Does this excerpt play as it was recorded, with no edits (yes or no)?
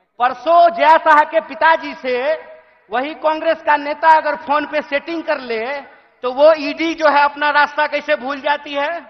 yes